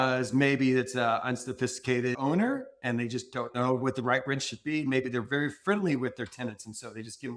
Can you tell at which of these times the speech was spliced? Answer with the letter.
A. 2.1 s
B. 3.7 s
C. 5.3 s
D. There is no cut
A